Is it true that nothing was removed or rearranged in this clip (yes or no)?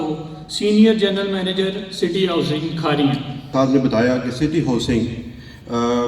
no